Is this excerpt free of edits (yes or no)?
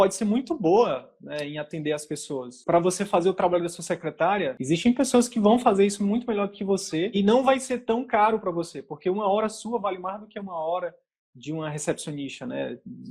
no